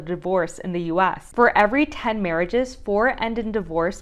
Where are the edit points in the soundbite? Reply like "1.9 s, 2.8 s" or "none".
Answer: none